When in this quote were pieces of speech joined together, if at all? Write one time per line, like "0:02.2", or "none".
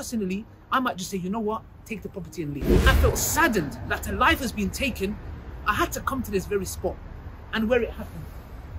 0:02.9